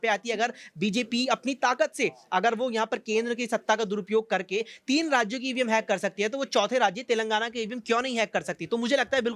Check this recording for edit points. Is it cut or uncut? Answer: uncut